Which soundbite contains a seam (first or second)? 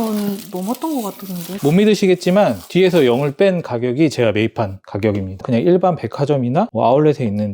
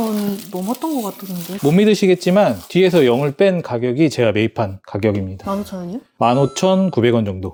first